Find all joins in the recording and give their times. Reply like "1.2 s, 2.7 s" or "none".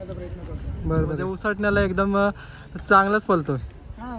1.3 s